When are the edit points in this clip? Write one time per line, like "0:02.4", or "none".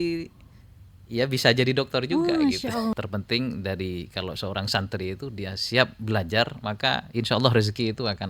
0:02.9